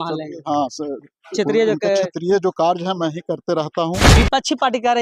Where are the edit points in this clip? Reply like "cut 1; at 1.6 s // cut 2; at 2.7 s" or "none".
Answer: cut 1; at 4.1 s

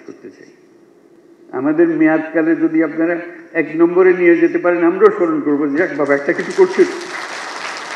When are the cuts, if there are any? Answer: cut 1; at 1.2 s

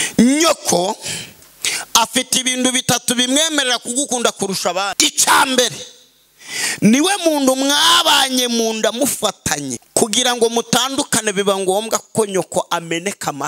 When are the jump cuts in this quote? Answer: cut 1; at 4.9 s // cut 2; at 9.8 s

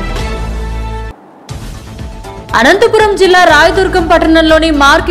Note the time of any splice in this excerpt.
none

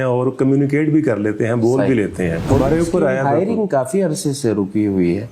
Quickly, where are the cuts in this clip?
cut 1; at 2.4 s

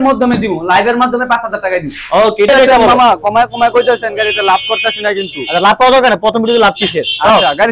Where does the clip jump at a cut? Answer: cut 1; at 2.5 s

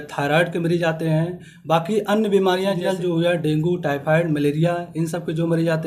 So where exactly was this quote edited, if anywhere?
cut 1; at 2.8 s

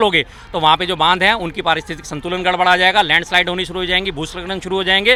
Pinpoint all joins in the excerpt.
none

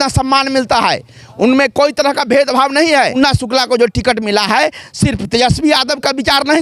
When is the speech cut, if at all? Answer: cut 1; at 3.1 s

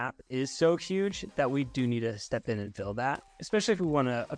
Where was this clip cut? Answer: cut 1; at 3.3 s

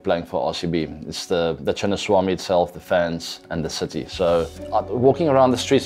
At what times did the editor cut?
cut 1; at 4.6 s

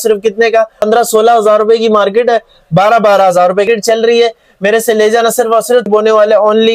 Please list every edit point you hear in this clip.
cut 1; at 0.9 s // cut 2; at 3.7 s // cut 3; at 5.9 s

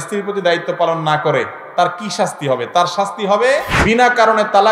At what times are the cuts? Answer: cut 1; at 3.7 s

